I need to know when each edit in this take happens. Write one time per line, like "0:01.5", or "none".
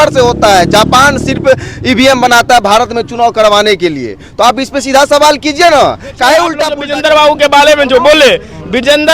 0:06.7

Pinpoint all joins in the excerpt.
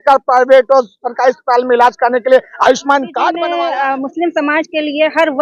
0:03.3

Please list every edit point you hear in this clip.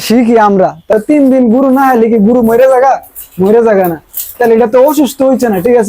0:00.9

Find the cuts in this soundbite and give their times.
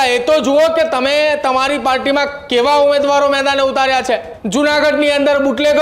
0:04.3

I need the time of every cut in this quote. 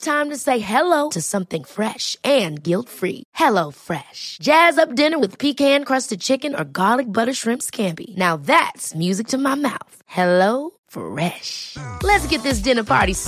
none

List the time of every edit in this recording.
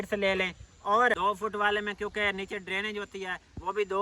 0:01.2

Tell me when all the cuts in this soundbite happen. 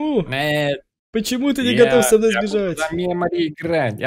none

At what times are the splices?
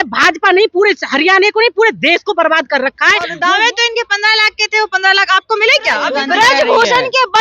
0:03.3
0:06.1

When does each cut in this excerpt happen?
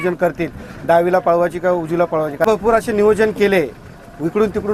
0:02.5

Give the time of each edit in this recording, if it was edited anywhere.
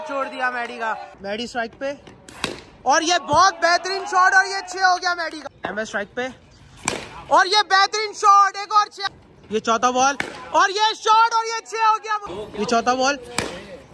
0:01.1
0:05.4
0:09.0
0:12.3

